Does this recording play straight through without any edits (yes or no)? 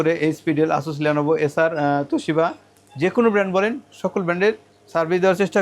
yes